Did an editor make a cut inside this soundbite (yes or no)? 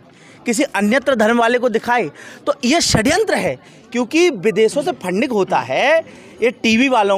no